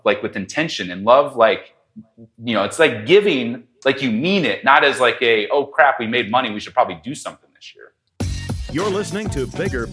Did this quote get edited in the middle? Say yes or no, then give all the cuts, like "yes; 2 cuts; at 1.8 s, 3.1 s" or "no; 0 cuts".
yes; 1 cut; at 8.3 s